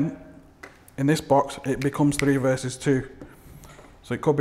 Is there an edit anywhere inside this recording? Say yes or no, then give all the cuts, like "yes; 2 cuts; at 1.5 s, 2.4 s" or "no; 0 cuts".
no; 0 cuts